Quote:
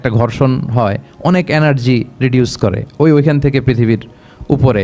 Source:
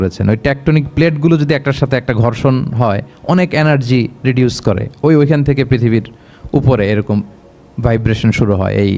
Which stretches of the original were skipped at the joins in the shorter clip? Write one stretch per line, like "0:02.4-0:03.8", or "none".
none